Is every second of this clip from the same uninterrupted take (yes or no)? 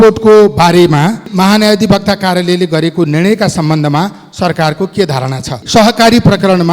no